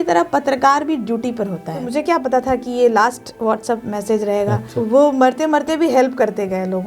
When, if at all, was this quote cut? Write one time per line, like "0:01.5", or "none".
0:01.8
0:04.7